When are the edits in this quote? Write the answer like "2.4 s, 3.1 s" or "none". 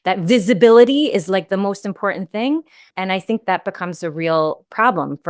2.8 s